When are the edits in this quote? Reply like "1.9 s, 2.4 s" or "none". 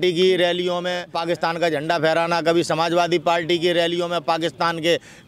1.1 s